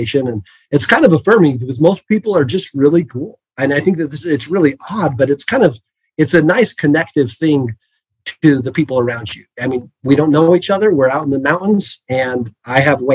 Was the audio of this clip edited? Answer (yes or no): no